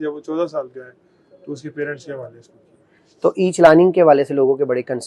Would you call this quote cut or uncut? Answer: uncut